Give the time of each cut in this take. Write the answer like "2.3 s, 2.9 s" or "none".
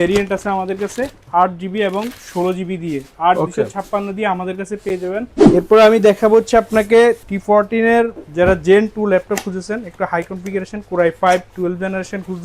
5.4 s, 7.3 s